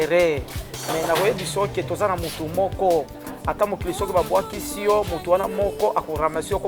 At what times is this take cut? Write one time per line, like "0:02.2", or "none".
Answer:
none

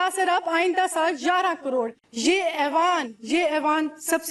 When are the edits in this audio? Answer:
0:02.0

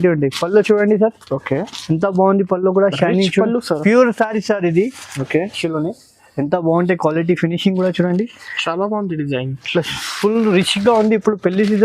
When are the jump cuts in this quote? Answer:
0:05.6

